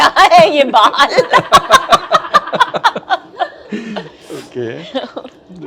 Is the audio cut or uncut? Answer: uncut